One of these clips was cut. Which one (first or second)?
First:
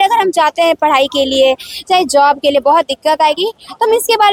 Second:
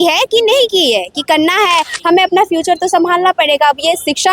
second